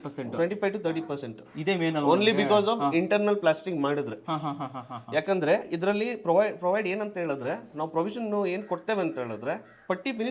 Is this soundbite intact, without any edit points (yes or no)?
yes